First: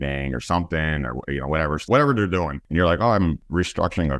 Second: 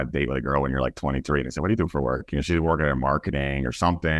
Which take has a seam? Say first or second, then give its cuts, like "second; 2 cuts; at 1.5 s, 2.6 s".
first; 3 cuts; at 1.9 s, 2.6 s, 3.4 s